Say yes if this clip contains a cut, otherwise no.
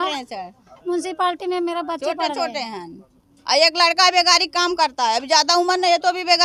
no